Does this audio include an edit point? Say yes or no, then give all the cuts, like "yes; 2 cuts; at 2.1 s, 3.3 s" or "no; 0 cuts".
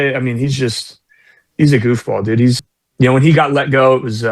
yes; 1 cut; at 2.6 s